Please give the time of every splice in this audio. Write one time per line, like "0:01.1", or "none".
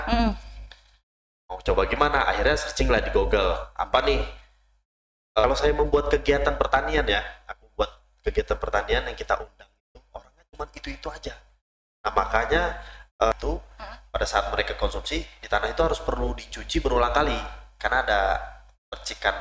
0:05.4
0:13.3